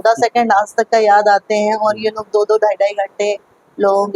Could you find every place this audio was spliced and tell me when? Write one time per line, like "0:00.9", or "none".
none